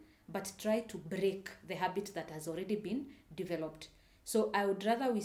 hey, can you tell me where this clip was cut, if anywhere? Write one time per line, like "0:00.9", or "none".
none